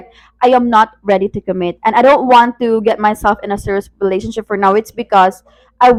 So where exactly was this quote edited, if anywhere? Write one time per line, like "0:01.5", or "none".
none